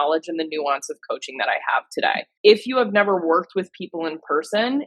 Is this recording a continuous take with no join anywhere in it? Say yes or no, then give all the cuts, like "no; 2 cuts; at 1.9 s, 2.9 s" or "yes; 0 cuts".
no; 1 cut; at 2.3 s